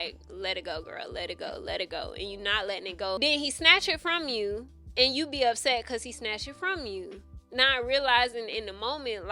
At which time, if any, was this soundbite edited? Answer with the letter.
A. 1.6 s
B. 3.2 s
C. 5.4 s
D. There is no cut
B